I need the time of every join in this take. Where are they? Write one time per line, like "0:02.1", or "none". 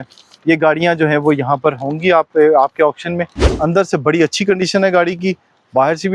0:03.5